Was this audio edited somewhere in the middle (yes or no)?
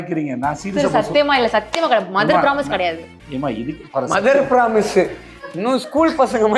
no